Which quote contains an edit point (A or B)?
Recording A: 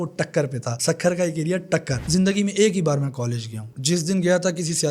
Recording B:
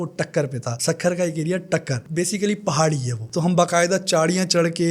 A